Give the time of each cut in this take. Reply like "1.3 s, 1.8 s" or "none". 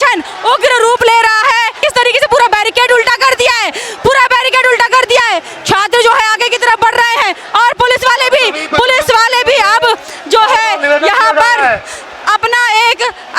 1.8 s